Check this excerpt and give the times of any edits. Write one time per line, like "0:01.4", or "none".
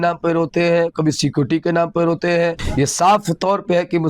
0:02.6